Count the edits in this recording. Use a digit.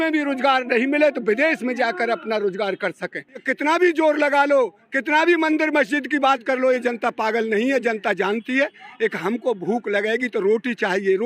1